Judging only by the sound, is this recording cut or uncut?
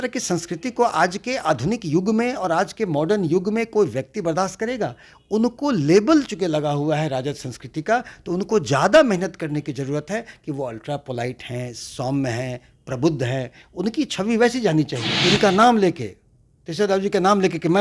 cut